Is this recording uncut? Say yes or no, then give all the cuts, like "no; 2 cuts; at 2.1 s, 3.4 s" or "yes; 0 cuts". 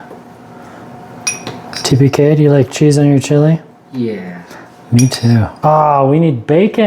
no; 1 cut; at 5.6 s